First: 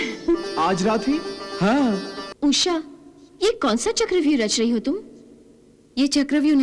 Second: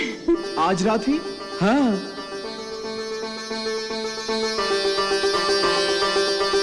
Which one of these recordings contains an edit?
first; 1 cut; at 2.2 s

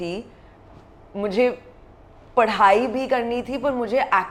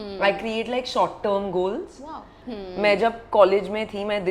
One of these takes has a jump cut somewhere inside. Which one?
second; 1 cut; at 2.4 s

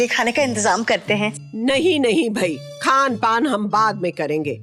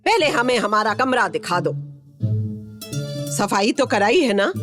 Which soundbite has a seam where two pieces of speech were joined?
second; 1 cut; at 3.1 s

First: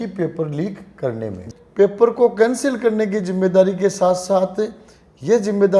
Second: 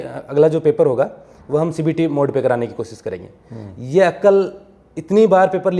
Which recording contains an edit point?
first; 1 cut; at 1.4 s

